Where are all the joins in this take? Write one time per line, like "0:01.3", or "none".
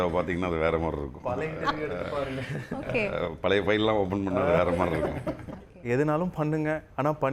0:05.7